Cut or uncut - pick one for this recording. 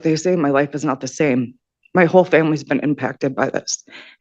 uncut